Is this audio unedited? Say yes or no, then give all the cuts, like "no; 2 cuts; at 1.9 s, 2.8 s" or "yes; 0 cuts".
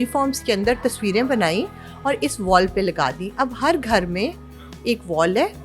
yes; 0 cuts